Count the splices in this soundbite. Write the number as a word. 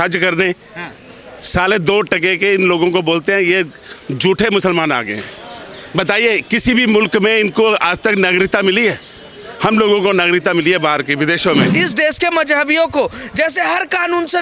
one